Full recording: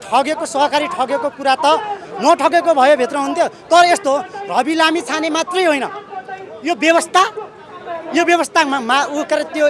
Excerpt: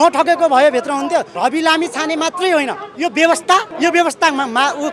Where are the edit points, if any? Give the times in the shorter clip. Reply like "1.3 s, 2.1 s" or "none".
1.3 s, 2.8 s, 3.7 s

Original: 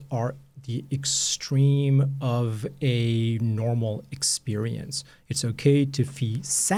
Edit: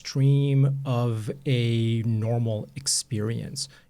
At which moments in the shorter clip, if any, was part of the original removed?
none

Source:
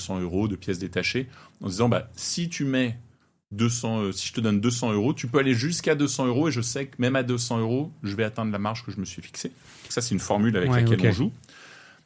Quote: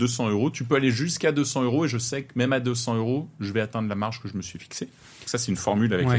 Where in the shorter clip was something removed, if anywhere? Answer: none

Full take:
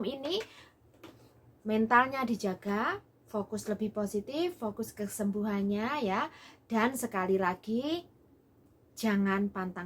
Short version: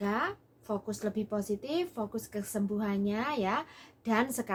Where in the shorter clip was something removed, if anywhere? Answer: none

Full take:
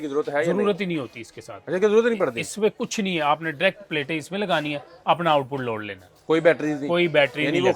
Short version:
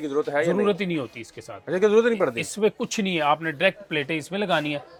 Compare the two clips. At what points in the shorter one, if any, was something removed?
none

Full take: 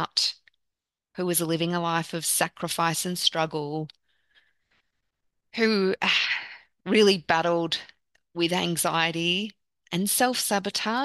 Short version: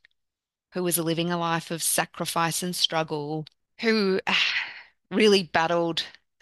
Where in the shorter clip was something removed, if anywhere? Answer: 3.6 s

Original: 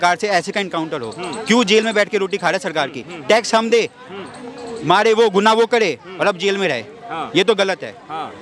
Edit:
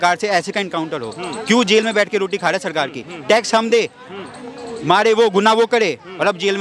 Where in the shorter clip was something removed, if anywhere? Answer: none

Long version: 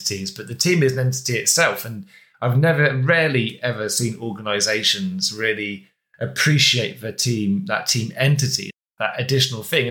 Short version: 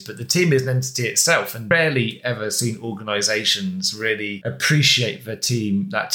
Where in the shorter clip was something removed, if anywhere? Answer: 1.6 s, 4.4 s

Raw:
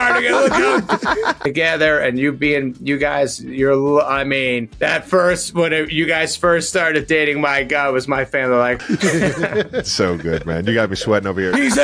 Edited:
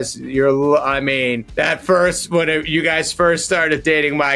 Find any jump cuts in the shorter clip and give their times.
none

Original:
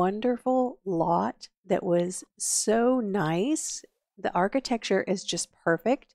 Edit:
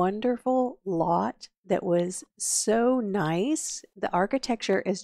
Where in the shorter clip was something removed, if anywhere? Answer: 4.1 s

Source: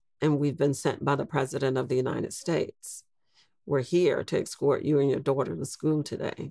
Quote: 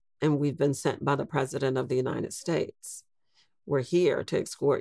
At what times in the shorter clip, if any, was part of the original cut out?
none

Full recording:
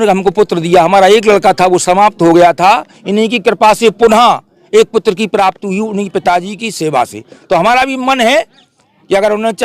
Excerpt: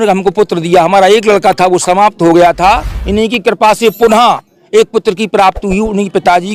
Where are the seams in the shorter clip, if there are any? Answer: none

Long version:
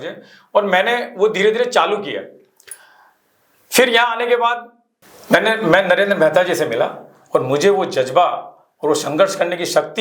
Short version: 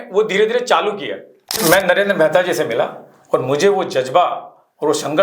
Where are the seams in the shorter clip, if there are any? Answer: 1.6 s

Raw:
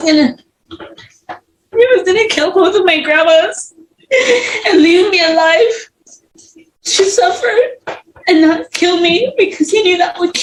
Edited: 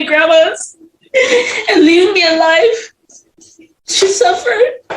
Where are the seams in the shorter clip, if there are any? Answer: none

